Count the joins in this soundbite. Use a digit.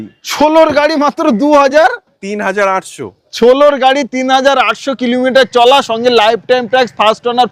0